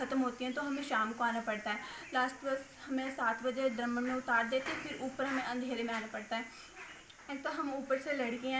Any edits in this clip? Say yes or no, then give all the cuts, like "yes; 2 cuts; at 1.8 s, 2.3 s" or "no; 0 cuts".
no; 0 cuts